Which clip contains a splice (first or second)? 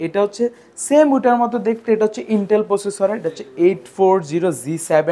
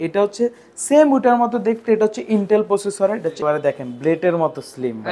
second